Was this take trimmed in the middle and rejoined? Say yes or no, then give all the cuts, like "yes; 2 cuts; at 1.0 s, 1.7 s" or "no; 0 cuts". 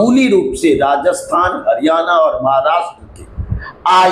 no; 0 cuts